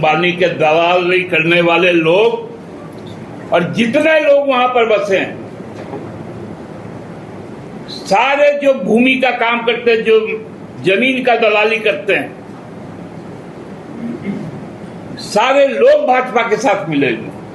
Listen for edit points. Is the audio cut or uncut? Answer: uncut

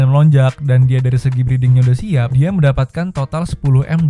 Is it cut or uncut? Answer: uncut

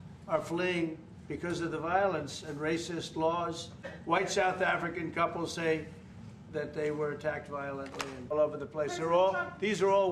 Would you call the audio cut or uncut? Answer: cut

